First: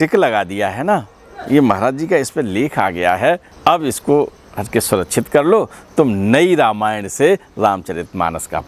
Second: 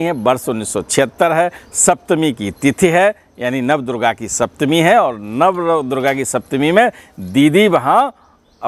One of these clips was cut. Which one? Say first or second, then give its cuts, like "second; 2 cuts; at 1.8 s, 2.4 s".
first; 1 cut; at 3.5 s